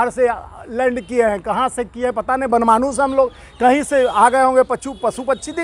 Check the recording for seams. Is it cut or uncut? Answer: uncut